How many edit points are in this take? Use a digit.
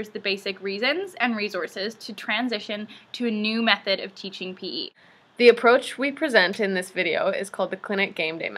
1